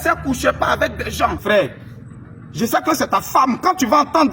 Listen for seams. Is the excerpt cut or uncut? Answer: cut